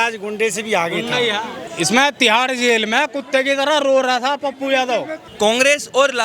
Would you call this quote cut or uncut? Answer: cut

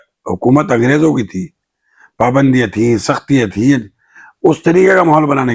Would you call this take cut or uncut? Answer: uncut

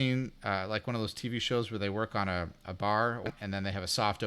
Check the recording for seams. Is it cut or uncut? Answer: cut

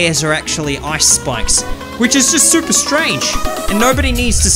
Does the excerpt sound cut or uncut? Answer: uncut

